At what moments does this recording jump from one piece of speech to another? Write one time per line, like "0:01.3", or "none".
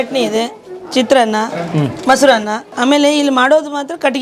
0:02.7